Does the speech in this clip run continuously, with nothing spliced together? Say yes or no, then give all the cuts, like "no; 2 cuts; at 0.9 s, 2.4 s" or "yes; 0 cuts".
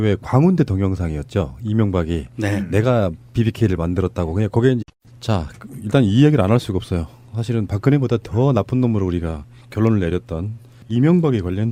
yes; 0 cuts